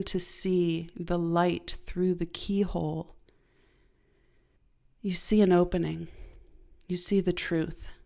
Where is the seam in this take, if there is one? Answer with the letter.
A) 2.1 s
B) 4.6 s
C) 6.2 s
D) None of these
B